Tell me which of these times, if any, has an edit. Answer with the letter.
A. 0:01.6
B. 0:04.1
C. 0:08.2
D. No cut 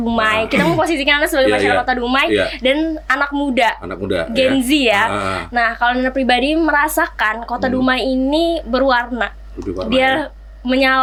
D